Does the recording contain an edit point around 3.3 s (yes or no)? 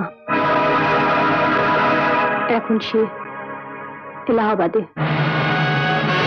no